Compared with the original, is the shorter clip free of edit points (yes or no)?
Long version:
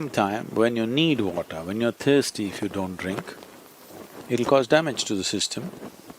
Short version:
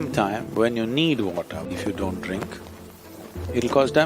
no